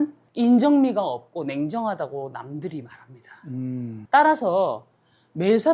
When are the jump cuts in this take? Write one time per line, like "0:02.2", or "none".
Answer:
none

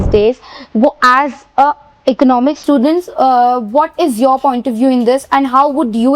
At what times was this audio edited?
none

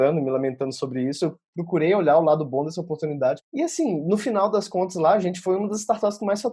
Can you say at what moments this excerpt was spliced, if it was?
0:01.5
0:03.4

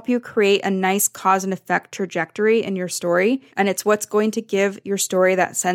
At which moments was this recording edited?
0:03.5

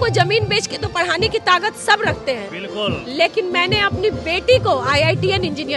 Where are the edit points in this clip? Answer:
none

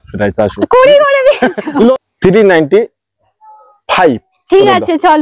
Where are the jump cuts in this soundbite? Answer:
0:01.9

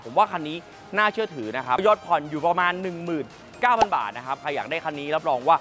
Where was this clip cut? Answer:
0:01.8

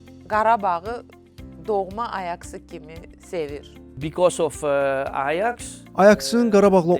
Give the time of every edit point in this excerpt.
0:03.8

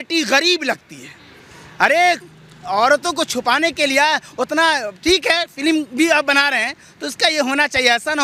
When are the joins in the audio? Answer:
none

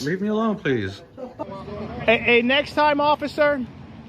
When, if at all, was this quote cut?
0:01.3

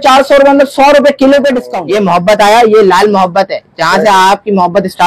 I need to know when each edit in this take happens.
0:01.7

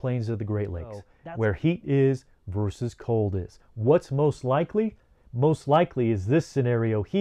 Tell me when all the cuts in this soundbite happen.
0:01.1

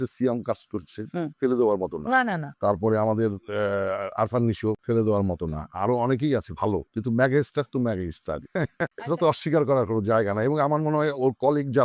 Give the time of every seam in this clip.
0:04.8
0:06.9
0:09.0

